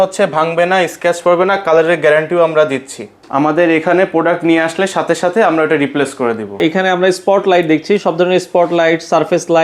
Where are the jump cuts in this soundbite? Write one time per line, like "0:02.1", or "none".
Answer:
0:03.2
0:06.6